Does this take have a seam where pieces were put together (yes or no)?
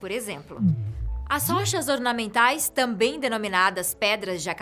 no